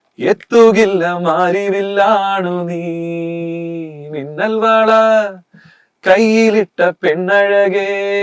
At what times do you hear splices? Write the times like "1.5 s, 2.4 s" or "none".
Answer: none